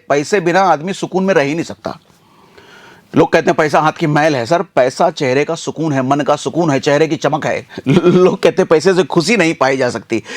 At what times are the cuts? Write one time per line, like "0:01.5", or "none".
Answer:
0:07.7